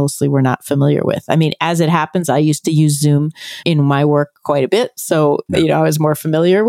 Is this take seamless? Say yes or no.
no